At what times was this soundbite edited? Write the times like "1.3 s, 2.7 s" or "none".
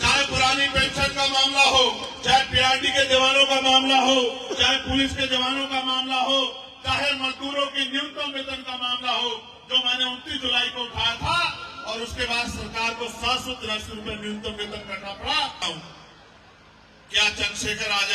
15.6 s